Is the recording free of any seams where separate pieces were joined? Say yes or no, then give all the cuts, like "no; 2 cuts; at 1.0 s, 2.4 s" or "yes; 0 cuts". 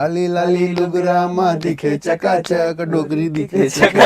yes; 0 cuts